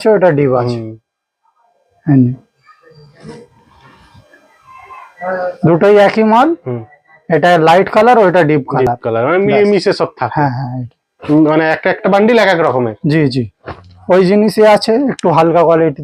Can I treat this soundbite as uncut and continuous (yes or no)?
yes